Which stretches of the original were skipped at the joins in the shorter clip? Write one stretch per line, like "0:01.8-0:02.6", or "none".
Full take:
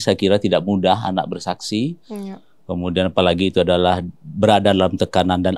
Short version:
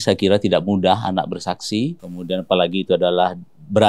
0:02.1-0:02.7